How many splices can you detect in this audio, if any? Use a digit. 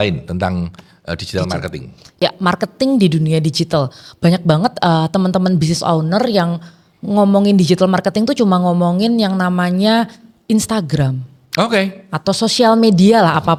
0